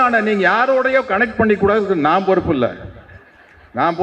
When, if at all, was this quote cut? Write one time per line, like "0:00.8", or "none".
none